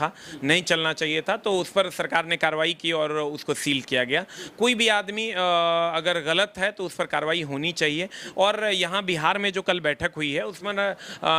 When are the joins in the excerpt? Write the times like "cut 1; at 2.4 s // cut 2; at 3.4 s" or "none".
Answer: none

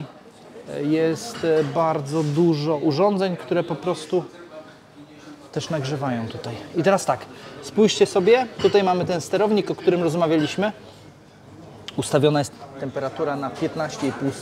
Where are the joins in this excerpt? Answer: none

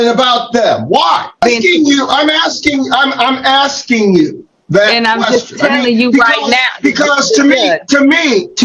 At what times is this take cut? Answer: cut 1; at 1.3 s

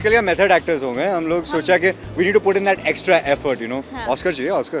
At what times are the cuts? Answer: none

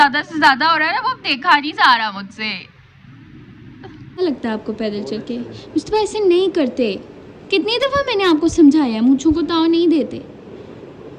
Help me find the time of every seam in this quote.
cut 1; at 4.2 s

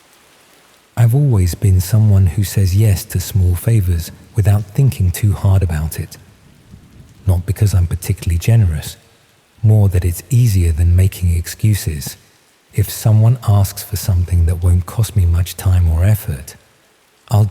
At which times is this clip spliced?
cut 1; at 0.9 s

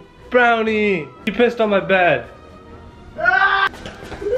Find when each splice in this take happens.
cut 1; at 1.2 s // cut 2; at 3.7 s

